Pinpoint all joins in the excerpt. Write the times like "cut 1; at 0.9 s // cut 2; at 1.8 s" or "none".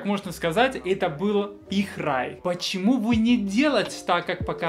cut 1; at 2.3 s